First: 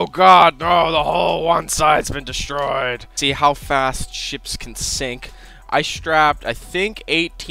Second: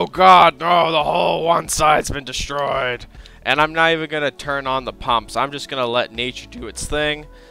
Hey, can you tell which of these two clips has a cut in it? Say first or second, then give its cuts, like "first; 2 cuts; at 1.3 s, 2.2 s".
first; 1 cut; at 3.1 s